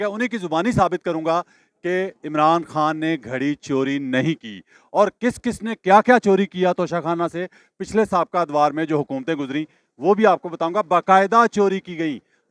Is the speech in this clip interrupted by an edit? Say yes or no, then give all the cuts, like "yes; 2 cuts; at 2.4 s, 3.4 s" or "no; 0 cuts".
no; 0 cuts